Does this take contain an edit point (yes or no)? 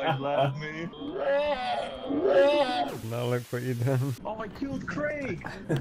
yes